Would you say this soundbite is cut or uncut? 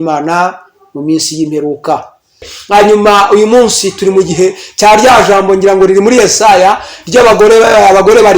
cut